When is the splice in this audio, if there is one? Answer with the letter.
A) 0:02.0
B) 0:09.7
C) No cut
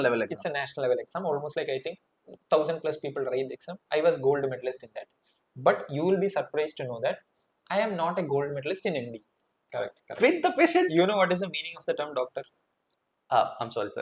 B